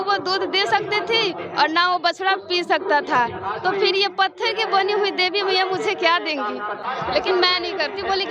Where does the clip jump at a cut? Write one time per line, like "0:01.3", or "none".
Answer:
0:06.9